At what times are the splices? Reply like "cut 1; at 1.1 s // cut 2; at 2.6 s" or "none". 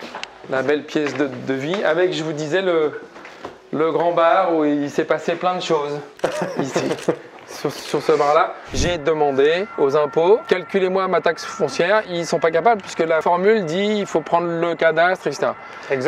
cut 1; at 8.8 s // cut 2; at 9.7 s // cut 3; at 10.4 s // cut 4; at 12.1 s // cut 5; at 13.2 s